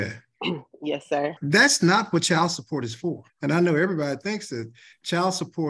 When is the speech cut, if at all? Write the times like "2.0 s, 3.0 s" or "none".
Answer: 1.4 s, 3.3 s